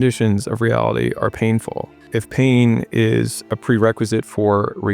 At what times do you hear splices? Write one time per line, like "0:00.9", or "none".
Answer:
0:02.1